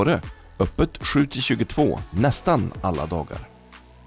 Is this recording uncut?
yes; 0 cuts

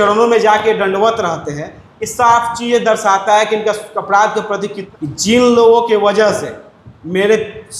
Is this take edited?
yes; 1 cut; at 4.8 s

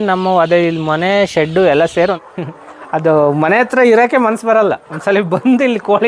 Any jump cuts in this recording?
yes; 1 cut; at 2.2 s

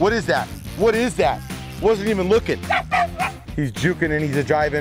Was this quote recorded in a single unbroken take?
no; 1 cut; at 3.4 s

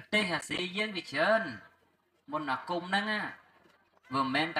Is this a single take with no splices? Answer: yes; 0 cuts

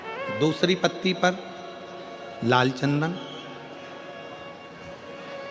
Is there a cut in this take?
no; 0 cuts

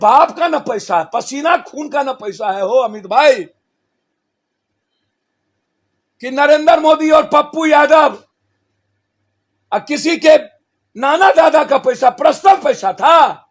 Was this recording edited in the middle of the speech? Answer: no; 0 cuts

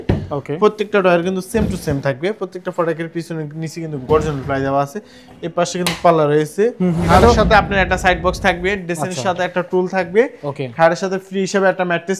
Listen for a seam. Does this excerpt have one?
yes; 1 cut; at 7.1 s

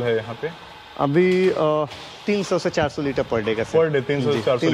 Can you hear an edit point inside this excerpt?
no; 0 cuts

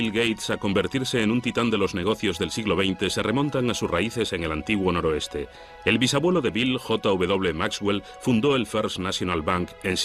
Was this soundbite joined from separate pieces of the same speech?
no; 0 cuts

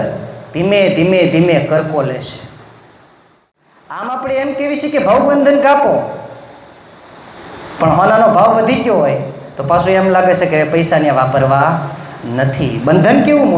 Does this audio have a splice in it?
yes; 1 cut; at 3.4 s

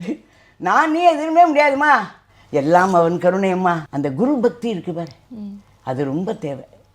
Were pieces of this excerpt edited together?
yes; 1 cut; at 3.9 s

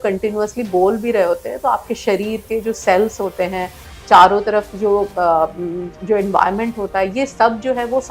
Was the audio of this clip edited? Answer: no; 0 cuts

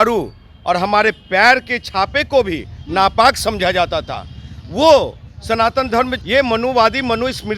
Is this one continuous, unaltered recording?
no; 1 cut; at 6.2 s

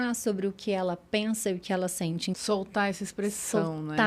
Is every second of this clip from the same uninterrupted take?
no; 1 cut; at 2.4 s

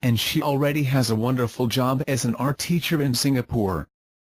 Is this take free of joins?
no; 1 cut; at 2.0 s

